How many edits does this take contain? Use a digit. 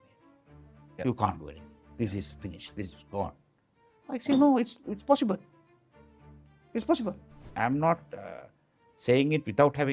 1